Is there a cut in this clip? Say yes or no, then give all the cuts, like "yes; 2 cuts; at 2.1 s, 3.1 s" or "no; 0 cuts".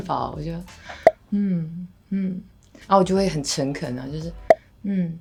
no; 0 cuts